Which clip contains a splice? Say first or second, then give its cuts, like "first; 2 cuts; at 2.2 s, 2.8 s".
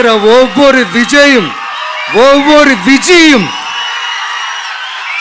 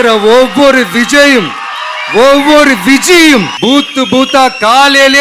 second; 1 cut; at 3.5 s